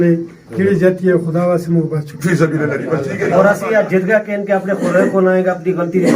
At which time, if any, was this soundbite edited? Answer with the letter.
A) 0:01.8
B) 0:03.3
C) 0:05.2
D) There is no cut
B